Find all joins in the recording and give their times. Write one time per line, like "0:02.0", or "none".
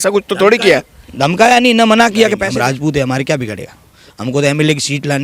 0:02.4
0:04.1

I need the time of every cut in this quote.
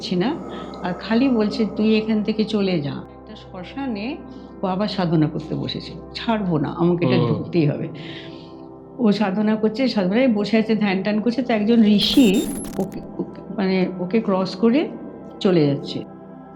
0:03.2

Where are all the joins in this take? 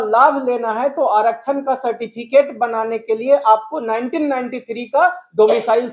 none

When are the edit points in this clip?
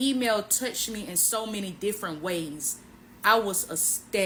none

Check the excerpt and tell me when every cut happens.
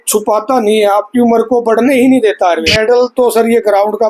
0:02.7

